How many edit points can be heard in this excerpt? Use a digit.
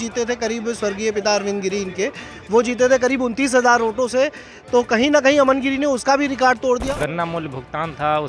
1